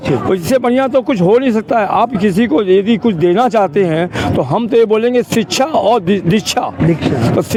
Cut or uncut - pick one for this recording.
uncut